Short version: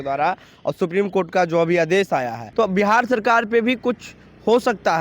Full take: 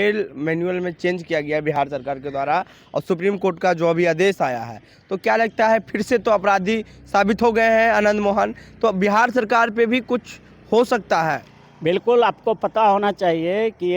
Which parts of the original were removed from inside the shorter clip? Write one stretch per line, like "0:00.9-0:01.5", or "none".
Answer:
0:04.7-0:08.6

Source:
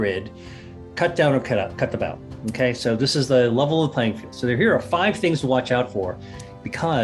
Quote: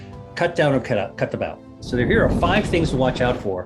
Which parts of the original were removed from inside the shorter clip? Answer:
0:02.4-0:04.3

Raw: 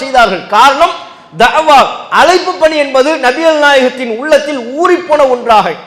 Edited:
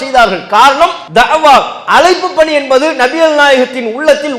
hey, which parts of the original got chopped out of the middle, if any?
0:01.0-0:01.2

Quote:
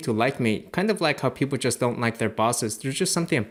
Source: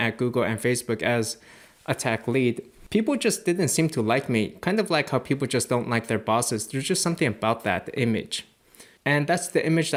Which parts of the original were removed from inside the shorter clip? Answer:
none

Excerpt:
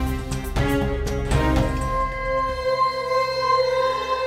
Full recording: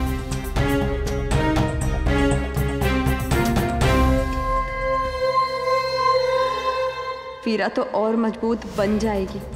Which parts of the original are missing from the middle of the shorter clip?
0:01.7-0:04.3

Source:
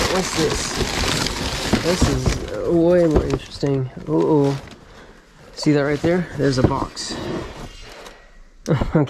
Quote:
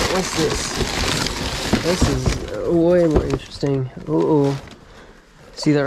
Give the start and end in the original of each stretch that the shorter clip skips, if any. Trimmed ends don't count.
none

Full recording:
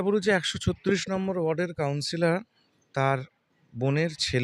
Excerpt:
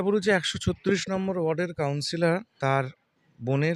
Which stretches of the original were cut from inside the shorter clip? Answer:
0:02.5-0:02.8

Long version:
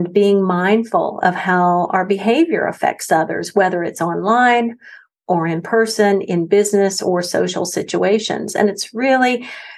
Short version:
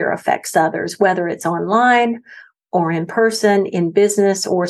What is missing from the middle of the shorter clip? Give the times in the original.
none

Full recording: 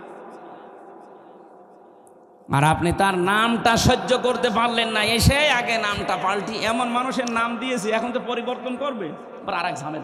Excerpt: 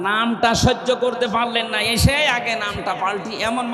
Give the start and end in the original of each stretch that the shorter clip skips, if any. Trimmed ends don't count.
none

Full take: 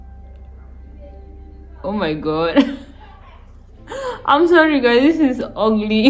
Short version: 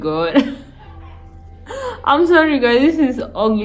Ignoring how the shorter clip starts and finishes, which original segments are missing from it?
none

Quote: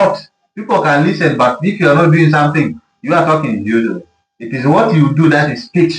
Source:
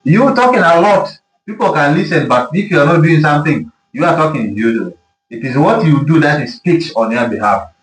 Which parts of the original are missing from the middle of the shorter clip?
none

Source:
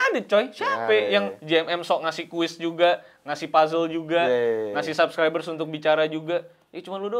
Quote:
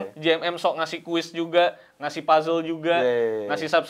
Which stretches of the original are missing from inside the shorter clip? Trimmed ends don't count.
none

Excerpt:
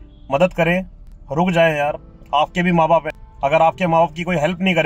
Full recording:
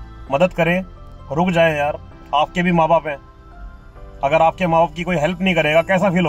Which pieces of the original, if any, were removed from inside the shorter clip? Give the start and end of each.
0:03.2-0:04.0

